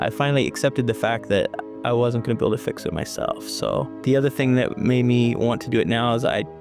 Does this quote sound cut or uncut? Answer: uncut